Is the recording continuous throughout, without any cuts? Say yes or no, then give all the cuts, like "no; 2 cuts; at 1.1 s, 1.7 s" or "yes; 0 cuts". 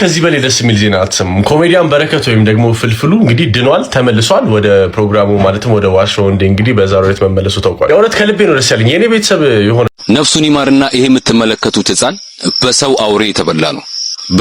no; 1 cut; at 9.9 s